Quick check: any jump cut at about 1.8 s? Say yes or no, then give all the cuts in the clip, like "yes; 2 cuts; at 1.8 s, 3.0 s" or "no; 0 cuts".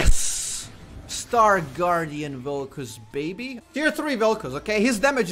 no; 1 cut; at 3.6 s